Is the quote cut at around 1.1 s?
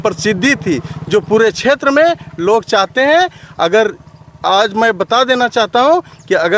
no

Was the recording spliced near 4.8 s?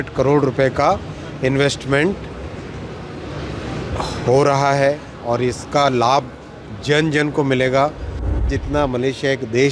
no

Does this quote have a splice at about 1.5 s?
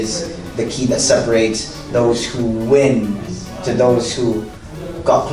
no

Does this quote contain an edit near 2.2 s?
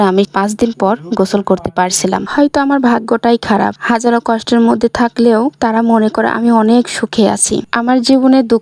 no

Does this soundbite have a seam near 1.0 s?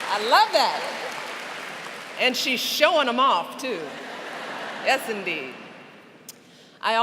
no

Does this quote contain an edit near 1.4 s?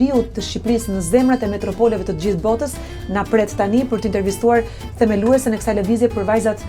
no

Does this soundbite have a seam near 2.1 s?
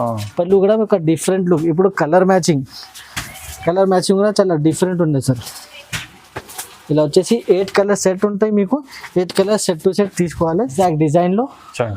no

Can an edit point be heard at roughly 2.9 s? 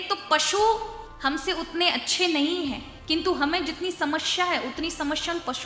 yes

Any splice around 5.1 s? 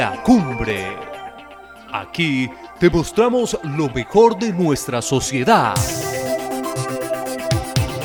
no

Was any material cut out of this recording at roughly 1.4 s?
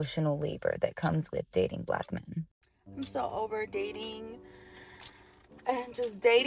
no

